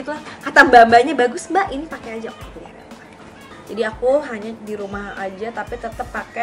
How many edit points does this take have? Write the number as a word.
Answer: one